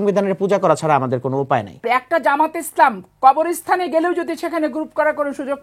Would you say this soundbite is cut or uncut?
cut